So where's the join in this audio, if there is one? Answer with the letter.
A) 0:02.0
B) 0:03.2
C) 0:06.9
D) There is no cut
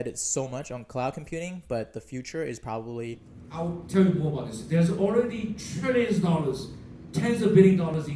B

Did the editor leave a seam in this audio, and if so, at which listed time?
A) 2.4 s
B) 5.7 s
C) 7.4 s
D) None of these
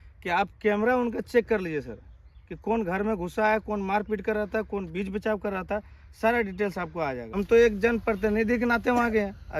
C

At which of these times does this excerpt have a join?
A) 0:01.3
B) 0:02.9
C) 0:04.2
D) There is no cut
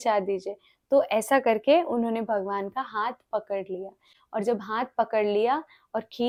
D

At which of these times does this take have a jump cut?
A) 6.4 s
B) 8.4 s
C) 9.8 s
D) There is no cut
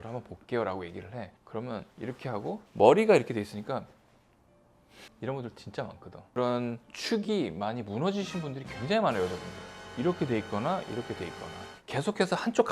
A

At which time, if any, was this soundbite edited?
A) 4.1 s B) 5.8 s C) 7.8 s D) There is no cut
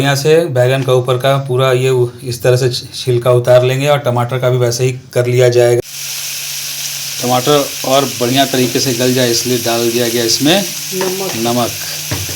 B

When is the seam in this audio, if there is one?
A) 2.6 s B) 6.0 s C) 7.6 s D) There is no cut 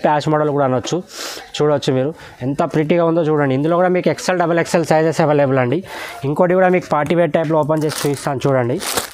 D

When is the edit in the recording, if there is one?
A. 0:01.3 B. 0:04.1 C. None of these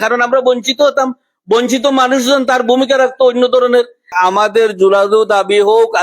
B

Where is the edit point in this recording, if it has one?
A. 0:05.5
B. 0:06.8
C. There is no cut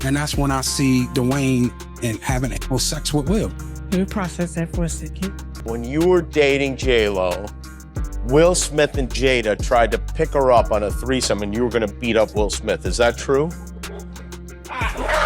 A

